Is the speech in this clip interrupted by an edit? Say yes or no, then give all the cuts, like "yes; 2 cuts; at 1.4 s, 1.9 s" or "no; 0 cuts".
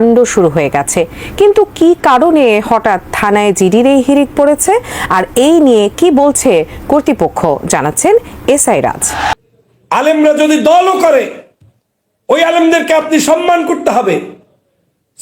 yes; 1 cut; at 9.3 s